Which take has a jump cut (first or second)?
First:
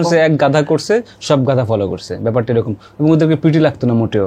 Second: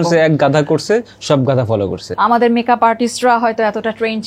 second